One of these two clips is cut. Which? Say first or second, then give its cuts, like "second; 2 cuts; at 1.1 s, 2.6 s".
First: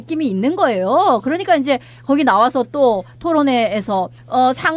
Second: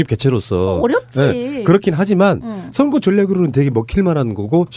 first; 1 cut; at 1.2 s